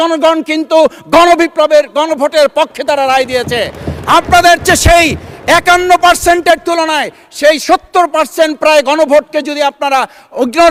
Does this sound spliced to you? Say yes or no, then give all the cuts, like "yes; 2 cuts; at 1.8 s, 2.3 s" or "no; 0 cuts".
no; 0 cuts